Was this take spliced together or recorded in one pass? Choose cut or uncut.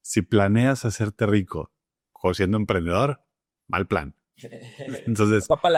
uncut